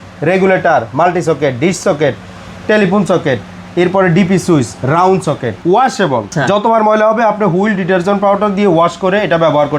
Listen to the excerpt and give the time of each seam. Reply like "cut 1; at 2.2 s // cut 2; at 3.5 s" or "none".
cut 1; at 5.5 s // cut 2; at 6.3 s